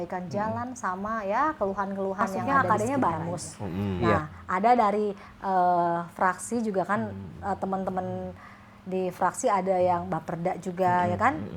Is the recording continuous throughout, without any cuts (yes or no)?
no